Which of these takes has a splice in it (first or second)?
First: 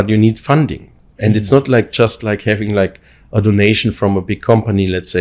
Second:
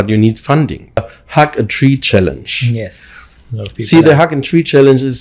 second